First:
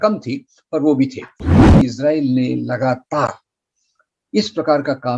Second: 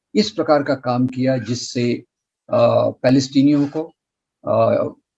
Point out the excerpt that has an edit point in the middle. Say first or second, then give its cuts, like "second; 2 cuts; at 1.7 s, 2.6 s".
first; 1 cut; at 1.7 s